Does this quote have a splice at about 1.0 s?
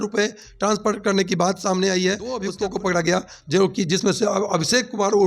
no; 1 cut; at 2.5 s

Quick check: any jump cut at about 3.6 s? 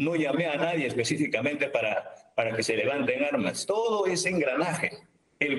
yes; 1 cut; at 3.6 s

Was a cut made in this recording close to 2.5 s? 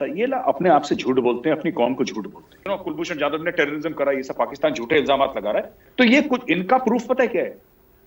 yes; 2 cuts; at 2.5 s, 5.8 s

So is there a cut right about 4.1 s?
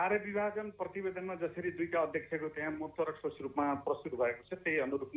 no; 0 cuts

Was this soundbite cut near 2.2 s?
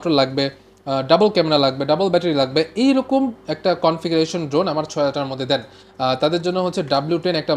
no; 0 cuts

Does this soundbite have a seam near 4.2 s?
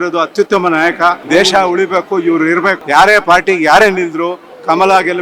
no; 2 cuts; at 1.2 s, 2.8 s

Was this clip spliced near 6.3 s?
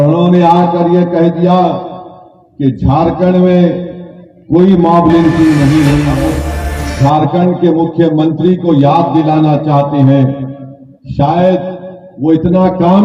yes; 1 cut; at 6.3 s

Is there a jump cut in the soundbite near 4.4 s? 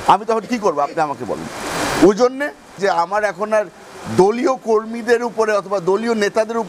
no; 1 cut; at 2.7 s

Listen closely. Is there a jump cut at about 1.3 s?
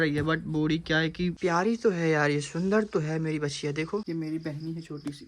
yes; 2 cuts; at 1.3 s, 4.0 s

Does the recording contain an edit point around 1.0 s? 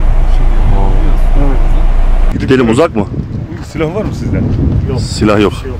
no; 1 cut; at 2.2 s

